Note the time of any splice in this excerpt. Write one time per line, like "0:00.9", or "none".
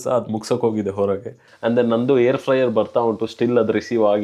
0:01.5

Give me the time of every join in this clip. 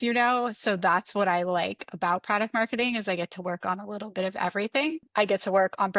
0:05.1

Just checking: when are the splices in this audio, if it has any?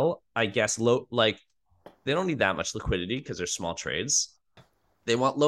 0:04.6

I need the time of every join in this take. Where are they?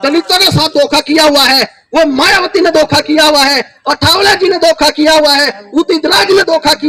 none

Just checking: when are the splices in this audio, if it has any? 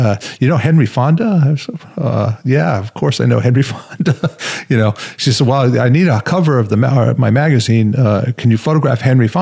none

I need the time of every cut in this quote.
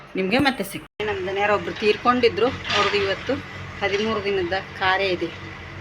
0:01.0

